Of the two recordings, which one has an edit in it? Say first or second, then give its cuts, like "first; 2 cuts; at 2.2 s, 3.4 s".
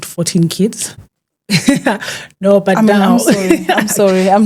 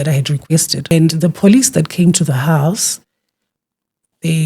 second; 1 cut; at 0.9 s